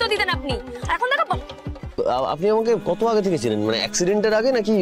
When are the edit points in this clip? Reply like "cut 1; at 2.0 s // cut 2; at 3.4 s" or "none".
cut 1; at 1.8 s